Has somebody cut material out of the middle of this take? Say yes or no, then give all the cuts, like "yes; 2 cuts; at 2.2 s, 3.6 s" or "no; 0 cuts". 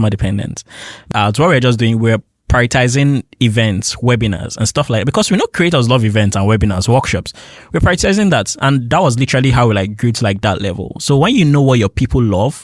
yes; 1 cut; at 1.1 s